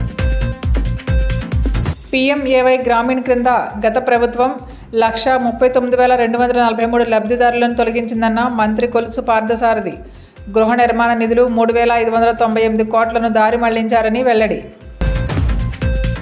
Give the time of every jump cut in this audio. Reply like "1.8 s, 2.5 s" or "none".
1.9 s